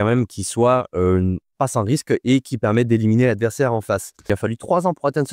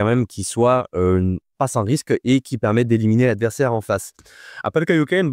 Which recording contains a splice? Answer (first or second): first